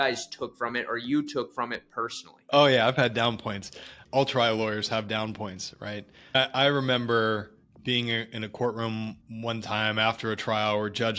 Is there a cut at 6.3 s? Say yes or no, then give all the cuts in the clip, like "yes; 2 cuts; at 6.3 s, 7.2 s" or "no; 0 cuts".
yes; 2 cuts; at 2.3 s, 6.3 s